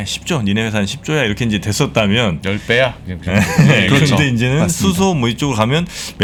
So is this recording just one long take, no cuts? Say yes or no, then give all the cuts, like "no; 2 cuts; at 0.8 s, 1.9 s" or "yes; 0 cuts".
yes; 0 cuts